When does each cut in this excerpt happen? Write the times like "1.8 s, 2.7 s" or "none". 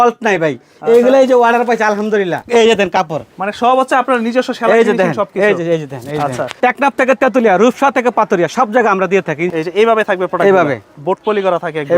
2.4 s, 6.5 s, 9.4 s